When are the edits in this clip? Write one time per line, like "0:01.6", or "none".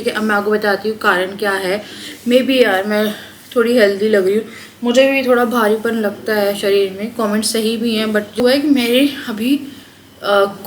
0:08.4